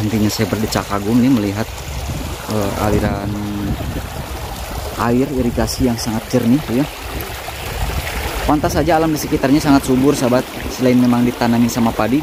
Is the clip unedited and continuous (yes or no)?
yes